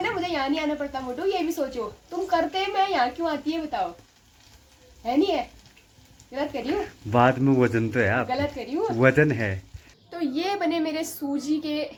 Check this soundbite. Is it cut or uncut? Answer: uncut